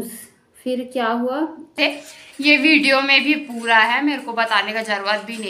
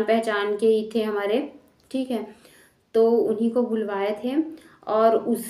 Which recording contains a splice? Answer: first; 1 cut; at 1.8 s

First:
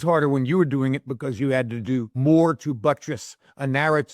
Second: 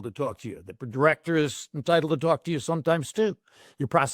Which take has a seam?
first; 1 cut; at 2.1 s

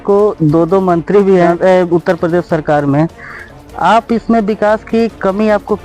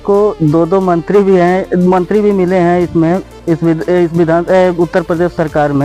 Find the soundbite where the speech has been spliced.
first; 1 cut; at 1.5 s

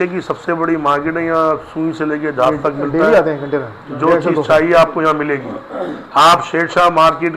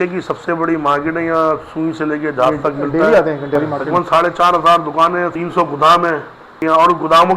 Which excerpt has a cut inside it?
second; 3 cuts; at 3.6 s, 5.3 s, 6.4 s

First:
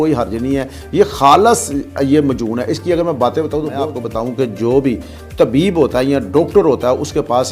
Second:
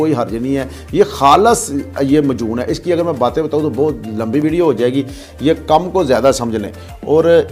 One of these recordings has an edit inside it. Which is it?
first; 1 cut; at 4.0 s

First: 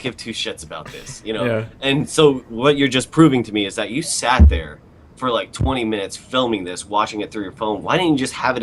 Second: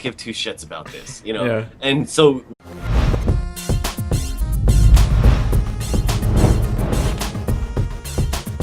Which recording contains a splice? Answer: first; 1 cut; at 2.5 s

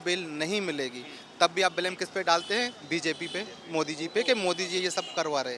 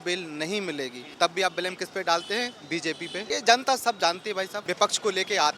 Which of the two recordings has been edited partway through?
second; 3 cuts; at 1.0 s, 3.2 s, 4.6 s

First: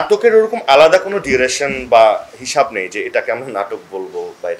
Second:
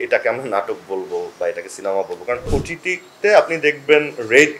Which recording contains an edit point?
second; 1 cut; at 2.6 s

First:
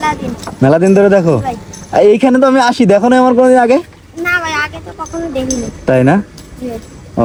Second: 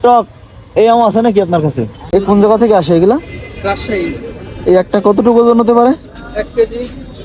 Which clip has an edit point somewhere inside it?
second; 1 cut; at 2.0 s

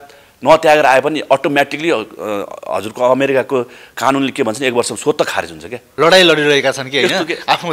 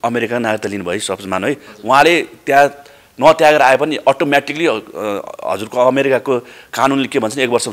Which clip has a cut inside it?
first; 1 cut; at 5.9 s

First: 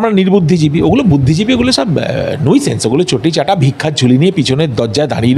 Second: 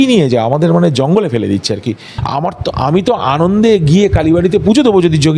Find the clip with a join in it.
second; 1 cut; at 2.1 s

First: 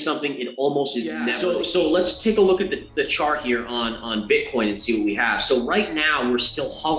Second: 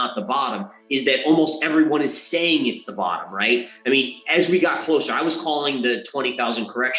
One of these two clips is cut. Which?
first; 1 cut; at 1.3 s

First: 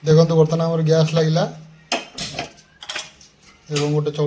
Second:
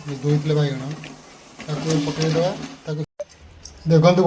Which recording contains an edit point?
second; 1 cut; at 3.1 s

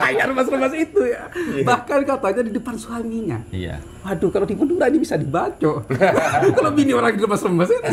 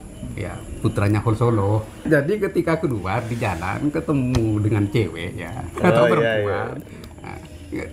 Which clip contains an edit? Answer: second; 1 cut; at 2.0 s

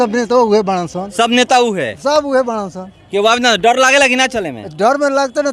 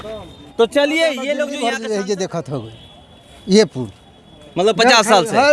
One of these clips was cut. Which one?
second; 1 cut; at 1.5 s

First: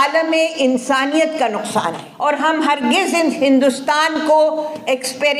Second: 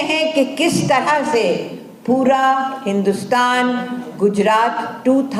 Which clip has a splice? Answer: first; 1 cut; at 2.0 s

